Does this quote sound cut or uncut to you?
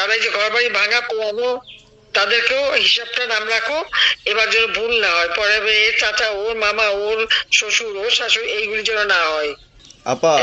uncut